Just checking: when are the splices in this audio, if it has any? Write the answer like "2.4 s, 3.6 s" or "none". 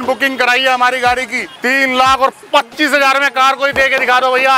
1.6 s

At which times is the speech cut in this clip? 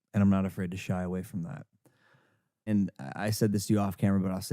2.7 s

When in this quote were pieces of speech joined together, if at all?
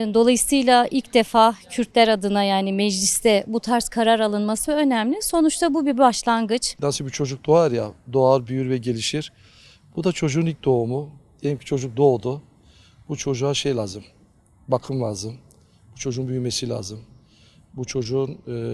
6.7 s

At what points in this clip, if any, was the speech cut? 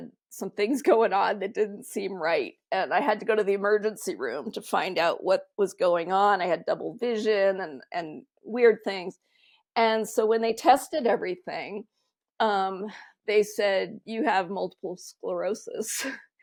none

